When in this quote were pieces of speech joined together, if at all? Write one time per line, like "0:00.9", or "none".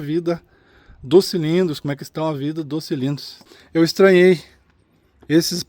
0:03.1

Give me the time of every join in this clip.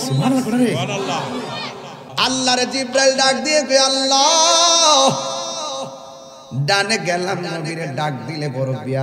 0:02.0

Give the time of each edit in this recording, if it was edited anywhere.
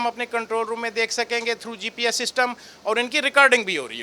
none

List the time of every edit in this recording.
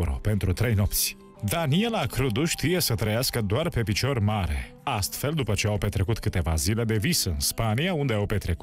0:01.2

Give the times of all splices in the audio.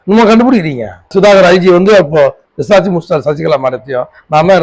0:00.9

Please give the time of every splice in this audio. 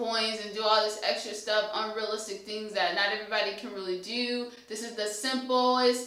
none

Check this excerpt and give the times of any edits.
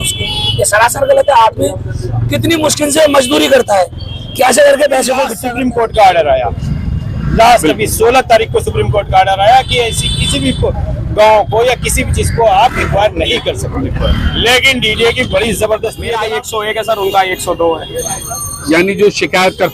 0:05.3
0:16.3

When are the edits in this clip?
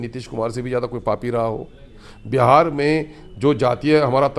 none

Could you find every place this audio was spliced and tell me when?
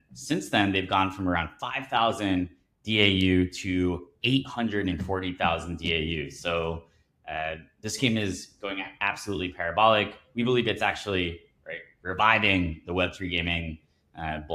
none

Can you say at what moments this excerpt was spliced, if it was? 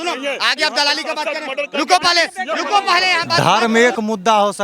0:03.3

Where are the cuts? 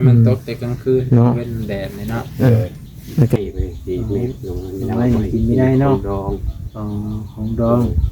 0:03.4

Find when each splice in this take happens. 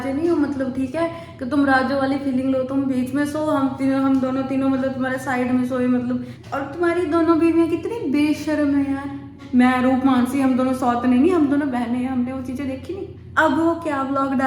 0:06.4
0:09.4
0:13.2

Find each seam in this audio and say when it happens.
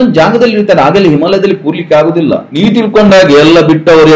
0:02.5

